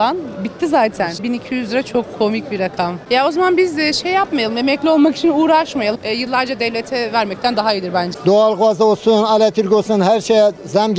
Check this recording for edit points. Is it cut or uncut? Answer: cut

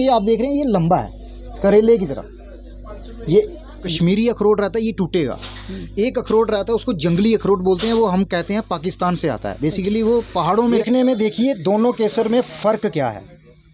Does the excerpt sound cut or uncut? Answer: cut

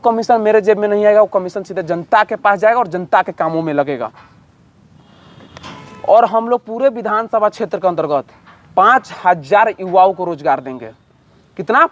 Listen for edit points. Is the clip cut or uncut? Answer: uncut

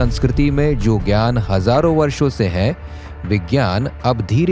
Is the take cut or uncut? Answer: uncut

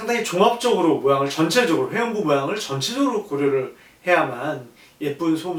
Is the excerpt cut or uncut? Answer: uncut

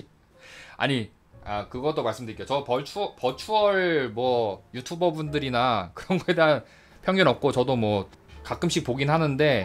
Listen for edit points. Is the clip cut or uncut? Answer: uncut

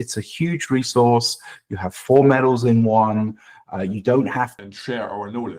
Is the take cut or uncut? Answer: cut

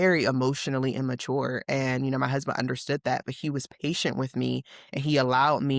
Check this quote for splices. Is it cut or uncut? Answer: uncut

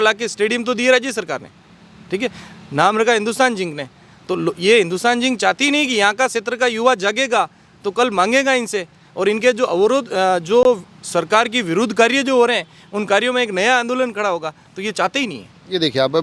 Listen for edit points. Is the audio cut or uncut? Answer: uncut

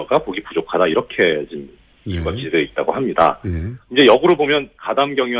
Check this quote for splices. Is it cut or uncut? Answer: cut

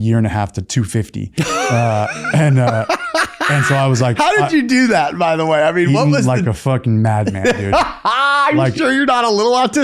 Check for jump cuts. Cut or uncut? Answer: uncut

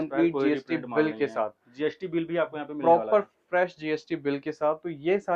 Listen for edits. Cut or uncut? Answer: uncut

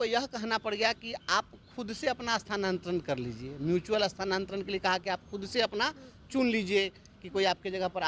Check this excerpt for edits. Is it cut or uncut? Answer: uncut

